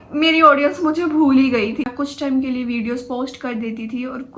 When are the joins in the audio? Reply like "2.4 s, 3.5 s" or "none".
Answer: 1.9 s